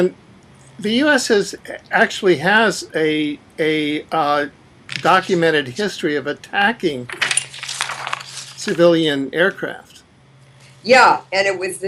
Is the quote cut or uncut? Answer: cut